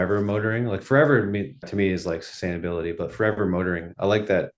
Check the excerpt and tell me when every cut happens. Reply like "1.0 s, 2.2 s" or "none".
1.7 s

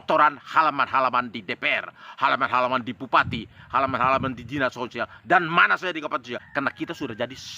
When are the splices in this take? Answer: 6.4 s

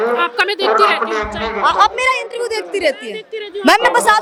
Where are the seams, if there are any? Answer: none

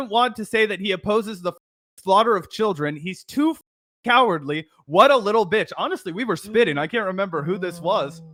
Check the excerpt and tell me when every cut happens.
none

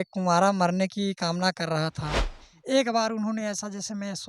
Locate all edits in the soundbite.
2.5 s

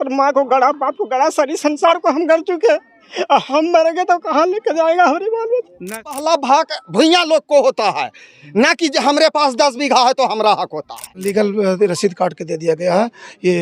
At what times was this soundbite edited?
6.1 s, 11.3 s

